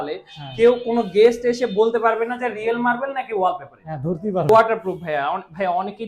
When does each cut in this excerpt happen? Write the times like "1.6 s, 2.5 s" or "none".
4.5 s